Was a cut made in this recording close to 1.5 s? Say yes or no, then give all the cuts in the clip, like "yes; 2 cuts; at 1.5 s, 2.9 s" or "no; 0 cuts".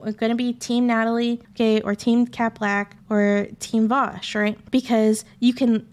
yes; 3 cuts; at 1.5 s, 2.9 s, 4.6 s